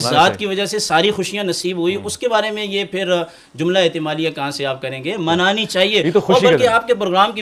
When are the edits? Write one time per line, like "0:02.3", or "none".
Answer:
none